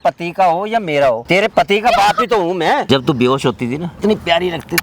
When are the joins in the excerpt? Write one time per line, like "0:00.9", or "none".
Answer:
0:01.2
0:02.8
0:03.9